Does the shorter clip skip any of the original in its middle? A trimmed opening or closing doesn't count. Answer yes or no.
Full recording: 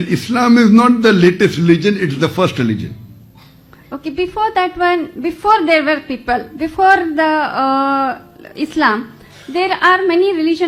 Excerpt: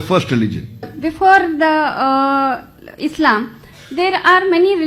yes